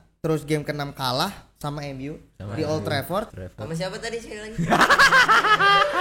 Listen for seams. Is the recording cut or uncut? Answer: cut